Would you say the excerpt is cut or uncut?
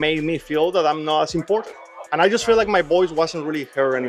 cut